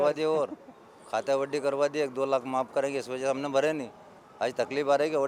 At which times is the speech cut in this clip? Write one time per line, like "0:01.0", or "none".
none

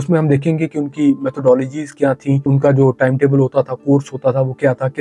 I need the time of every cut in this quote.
0:02.4

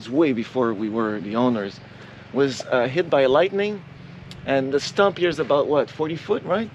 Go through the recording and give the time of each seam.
none

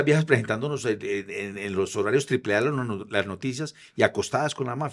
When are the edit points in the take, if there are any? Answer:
none

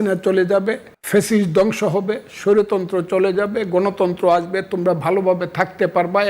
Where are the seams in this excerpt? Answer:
0:00.9

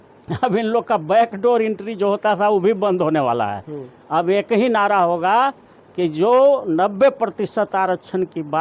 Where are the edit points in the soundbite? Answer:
none

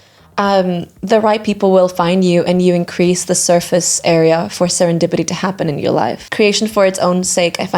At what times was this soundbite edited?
0:06.2

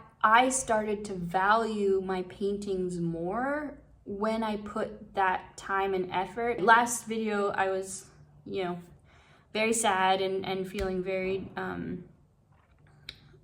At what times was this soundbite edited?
0:06.6

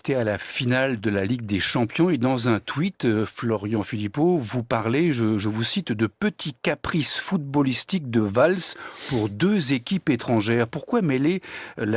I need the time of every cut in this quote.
0:10.7

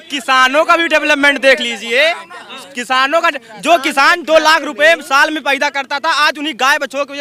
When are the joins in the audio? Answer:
none

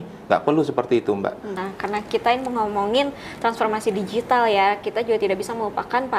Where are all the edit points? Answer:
0:01.6

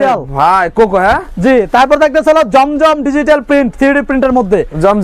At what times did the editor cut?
none

